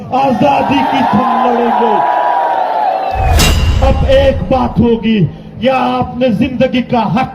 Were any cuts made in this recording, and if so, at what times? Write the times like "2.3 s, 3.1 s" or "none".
3.6 s